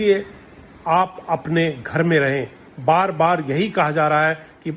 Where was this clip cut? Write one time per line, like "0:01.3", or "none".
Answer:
none